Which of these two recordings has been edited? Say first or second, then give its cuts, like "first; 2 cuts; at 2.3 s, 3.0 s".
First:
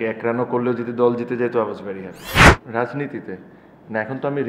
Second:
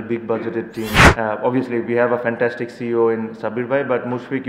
second; 1 cut; at 1.0 s